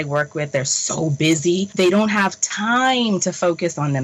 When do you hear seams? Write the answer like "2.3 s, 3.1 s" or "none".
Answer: 1.7 s